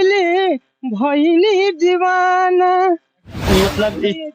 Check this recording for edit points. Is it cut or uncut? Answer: cut